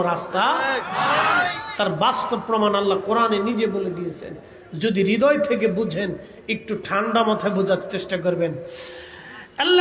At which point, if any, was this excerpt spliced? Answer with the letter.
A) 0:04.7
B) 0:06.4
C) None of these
C